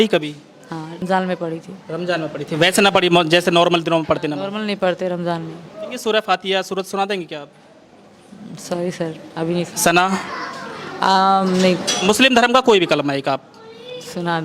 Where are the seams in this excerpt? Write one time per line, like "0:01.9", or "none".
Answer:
0:01.0
0:05.9
0:11.9